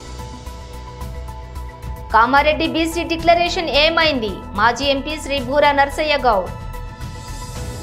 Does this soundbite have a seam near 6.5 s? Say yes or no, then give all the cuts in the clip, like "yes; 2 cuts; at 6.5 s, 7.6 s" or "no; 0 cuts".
yes; 2 cuts; at 2.1 s, 6.5 s